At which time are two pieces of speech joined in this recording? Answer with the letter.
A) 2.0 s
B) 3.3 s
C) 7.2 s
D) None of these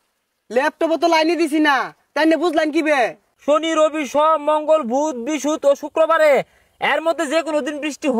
B